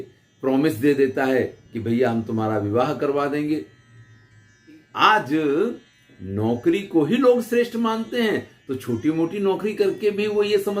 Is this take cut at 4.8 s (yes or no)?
yes